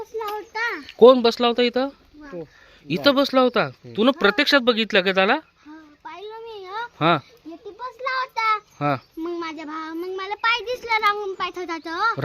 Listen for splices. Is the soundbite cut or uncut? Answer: uncut